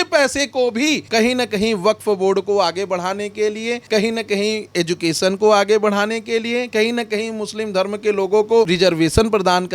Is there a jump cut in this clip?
yes; 3 cuts; at 1.0 s, 3.8 s, 8.7 s

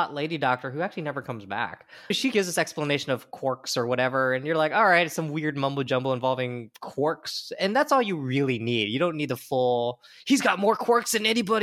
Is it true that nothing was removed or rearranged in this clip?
no; 1 cut; at 2.2 s

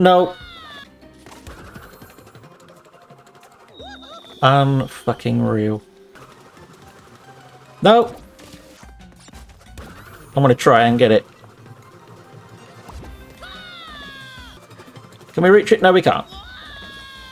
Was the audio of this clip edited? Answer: yes; 4 cuts; at 0.9 s, 6.2 s, 8.8 s, 14.6 s

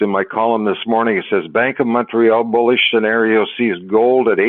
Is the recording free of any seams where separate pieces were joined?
yes; 0 cuts

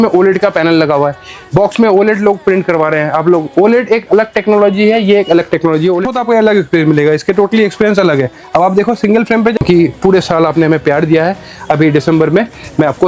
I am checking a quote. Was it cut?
yes; 2 cuts; at 6.0 s, 9.6 s

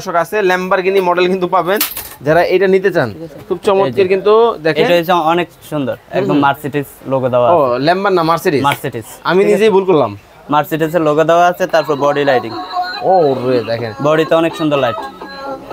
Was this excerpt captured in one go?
yes; 0 cuts

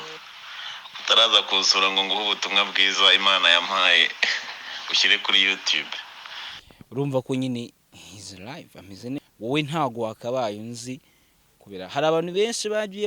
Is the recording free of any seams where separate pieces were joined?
no; 1 cut; at 9.2 s

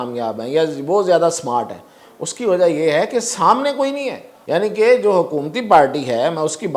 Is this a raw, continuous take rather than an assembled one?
no; 1 cut; at 4.3 s

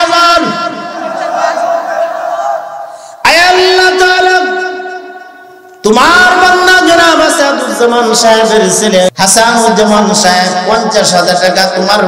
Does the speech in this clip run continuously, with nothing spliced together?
no; 1 cut; at 9.1 s

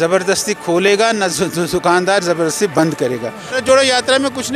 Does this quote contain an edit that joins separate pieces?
yes; 1 cut; at 3.6 s

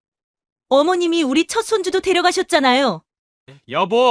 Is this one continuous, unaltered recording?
no; 1 cut; at 3.1 s

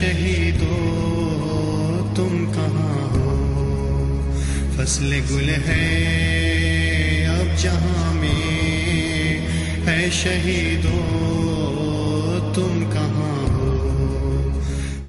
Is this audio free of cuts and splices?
no; 1 cut; at 4.2 s

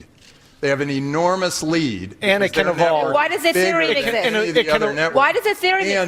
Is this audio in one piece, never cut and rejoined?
yes; 0 cuts

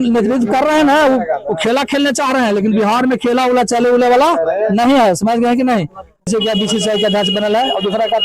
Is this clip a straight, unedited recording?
no; 1 cut; at 6.3 s

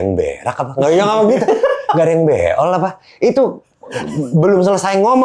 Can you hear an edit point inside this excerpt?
no; 0 cuts

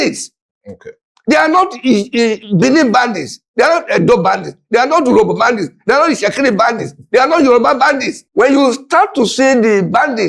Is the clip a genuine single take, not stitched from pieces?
no; 1 cut; at 8.2 s

